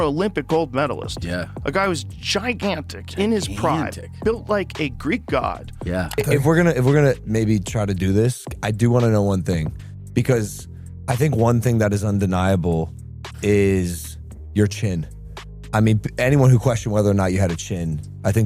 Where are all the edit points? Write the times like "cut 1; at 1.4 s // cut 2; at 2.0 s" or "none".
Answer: cut 1; at 6.1 s